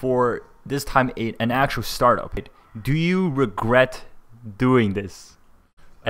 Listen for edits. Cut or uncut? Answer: cut